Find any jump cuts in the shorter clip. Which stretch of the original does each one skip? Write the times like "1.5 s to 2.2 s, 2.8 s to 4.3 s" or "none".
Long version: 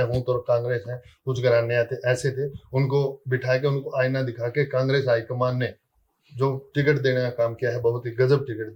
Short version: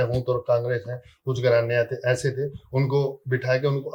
none